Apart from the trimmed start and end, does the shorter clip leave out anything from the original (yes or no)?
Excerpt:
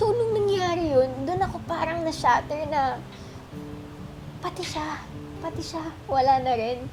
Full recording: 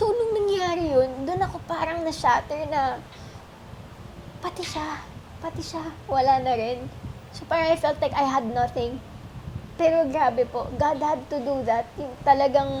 no